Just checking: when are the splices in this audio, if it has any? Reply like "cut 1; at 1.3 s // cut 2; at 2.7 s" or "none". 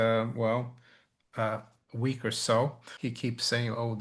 cut 1; at 2.9 s